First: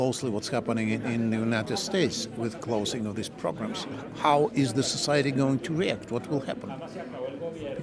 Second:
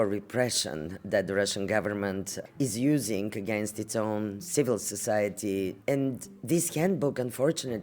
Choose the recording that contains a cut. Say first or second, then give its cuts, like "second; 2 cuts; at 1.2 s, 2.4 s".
second; 2 cuts; at 2.4 s, 5.8 s